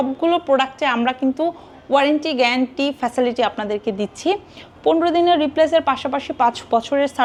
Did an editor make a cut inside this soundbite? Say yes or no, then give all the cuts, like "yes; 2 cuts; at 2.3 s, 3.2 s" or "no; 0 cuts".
no; 0 cuts